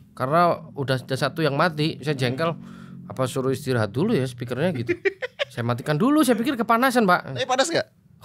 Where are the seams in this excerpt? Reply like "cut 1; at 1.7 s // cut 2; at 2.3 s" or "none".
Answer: none